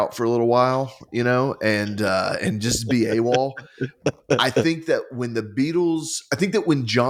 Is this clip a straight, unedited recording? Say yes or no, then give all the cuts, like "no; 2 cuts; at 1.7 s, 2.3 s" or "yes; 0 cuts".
yes; 0 cuts